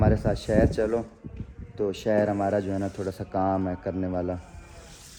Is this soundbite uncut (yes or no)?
yes